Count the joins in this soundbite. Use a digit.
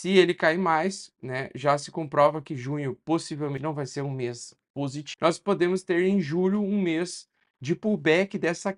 1